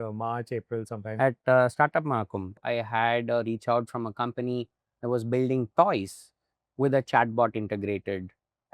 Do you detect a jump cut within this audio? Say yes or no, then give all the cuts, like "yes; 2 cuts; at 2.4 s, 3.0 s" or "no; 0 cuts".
yes; 1 cut; at 2.6 s